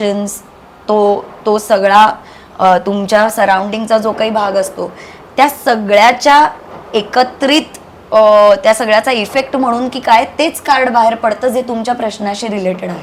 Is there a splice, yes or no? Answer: no